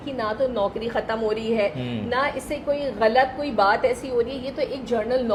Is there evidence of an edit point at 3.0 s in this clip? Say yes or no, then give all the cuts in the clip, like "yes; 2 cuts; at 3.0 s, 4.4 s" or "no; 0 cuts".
no; 0 cuts